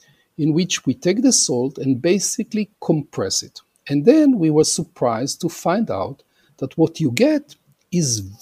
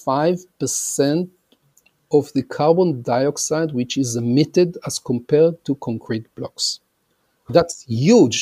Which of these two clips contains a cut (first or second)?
second